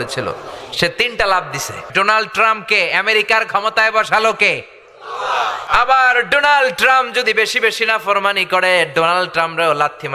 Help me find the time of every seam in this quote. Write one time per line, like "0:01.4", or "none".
0:01.8
0:05.7